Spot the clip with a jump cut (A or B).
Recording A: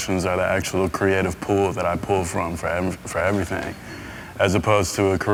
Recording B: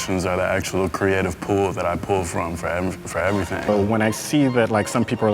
B